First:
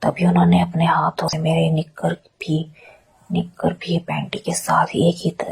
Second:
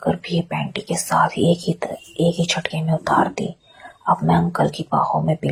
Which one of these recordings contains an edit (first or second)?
first